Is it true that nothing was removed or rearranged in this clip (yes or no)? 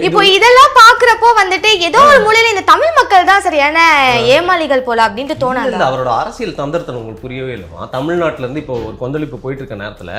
yes